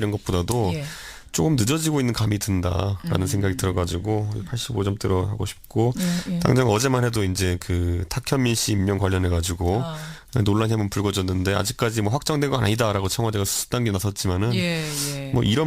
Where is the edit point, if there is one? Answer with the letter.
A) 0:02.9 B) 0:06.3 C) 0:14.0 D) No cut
C